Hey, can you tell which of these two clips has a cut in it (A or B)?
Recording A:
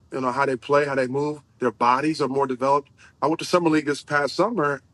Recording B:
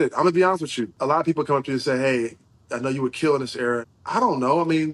B